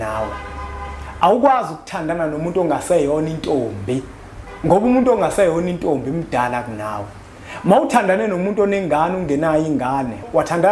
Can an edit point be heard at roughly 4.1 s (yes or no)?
no